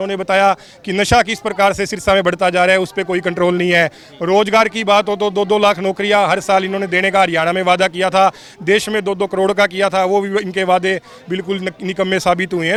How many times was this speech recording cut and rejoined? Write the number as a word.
zero